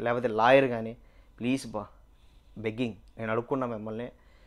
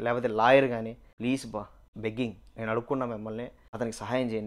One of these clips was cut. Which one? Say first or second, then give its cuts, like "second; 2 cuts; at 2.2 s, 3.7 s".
second; 2 cuts; at 1.3 s, 3.6 s